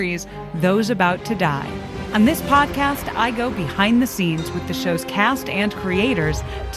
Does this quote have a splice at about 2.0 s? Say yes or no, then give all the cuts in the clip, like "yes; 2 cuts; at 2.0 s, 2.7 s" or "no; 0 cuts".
yes; 1 cut; at 2.0 s